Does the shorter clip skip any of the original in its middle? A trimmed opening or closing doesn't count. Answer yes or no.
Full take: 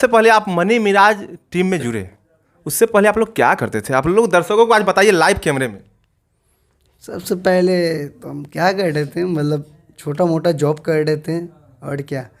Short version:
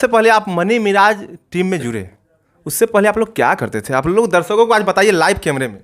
no